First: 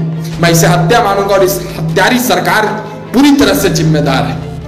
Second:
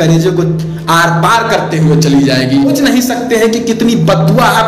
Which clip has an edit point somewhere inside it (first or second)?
second